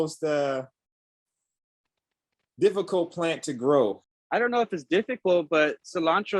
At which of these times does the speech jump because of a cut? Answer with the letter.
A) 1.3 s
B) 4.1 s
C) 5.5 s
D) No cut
B